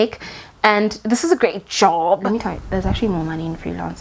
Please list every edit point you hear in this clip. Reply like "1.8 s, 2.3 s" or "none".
2.3 s